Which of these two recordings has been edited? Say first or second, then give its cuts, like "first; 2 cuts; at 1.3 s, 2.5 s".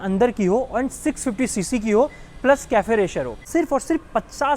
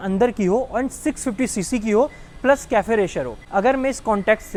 first; 1 cut; at 3.4 s